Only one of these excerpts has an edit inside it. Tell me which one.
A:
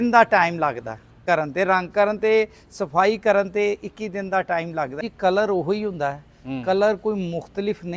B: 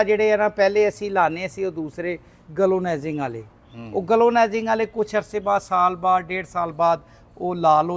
A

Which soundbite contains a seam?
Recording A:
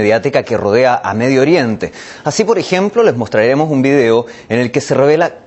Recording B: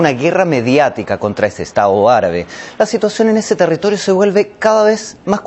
B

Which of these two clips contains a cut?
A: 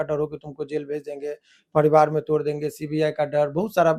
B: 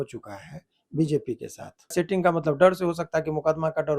B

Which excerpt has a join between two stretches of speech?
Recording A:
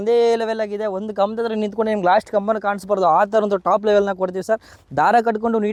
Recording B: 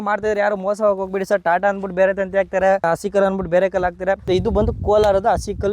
B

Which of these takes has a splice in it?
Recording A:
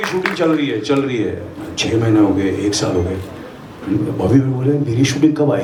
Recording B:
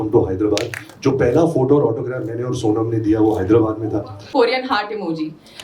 B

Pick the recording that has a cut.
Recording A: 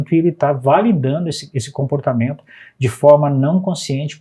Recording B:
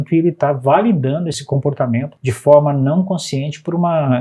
B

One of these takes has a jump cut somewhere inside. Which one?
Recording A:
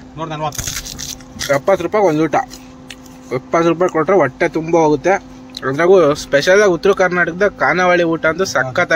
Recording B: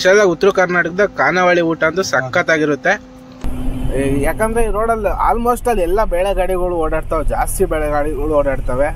B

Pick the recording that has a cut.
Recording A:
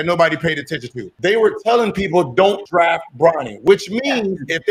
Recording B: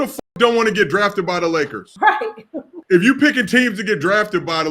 B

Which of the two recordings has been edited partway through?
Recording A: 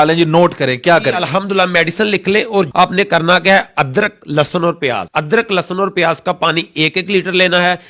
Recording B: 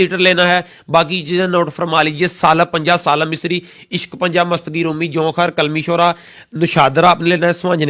A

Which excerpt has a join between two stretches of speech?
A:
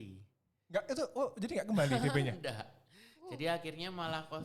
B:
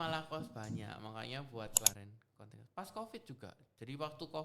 B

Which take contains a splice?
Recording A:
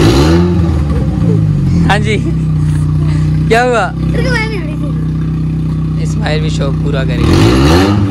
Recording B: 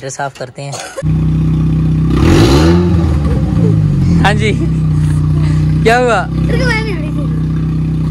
B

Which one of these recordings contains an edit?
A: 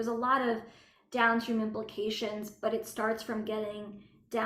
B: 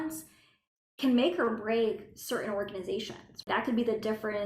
B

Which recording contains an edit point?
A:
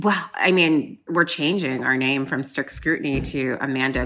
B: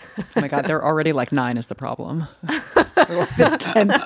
A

